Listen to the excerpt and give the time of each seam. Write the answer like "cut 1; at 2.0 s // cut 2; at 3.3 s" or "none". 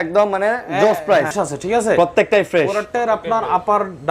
cut 1; at 1.3 s